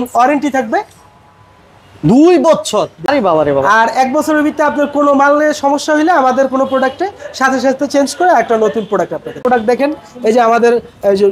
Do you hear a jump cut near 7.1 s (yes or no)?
no